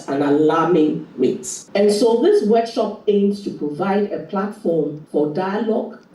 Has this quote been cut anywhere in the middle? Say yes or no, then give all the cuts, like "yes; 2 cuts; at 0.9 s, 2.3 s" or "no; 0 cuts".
yes; 2 cuts; at 1.0 s, 5.0 s